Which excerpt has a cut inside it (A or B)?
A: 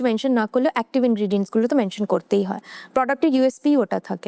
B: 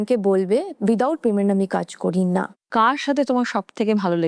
B